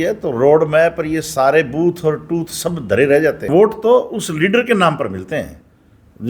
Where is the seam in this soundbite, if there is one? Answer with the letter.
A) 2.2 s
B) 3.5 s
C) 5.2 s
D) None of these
B